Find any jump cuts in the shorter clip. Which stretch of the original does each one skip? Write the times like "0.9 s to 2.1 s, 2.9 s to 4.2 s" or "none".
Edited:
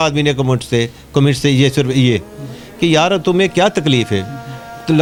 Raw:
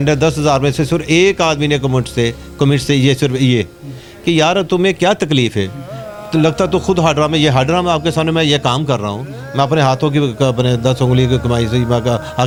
none